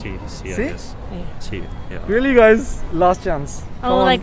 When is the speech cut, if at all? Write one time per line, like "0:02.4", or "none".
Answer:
none